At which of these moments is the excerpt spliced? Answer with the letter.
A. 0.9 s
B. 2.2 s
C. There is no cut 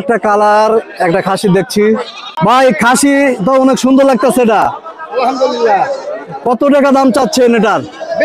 B